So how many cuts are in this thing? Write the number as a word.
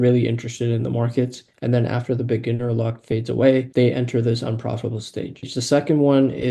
two